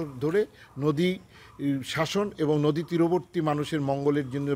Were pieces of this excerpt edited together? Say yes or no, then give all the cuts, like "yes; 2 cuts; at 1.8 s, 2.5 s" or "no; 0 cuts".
no; 0 cuts